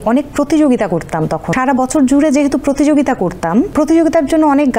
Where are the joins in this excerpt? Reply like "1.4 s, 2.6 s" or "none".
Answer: 1.5 s, 3.7 s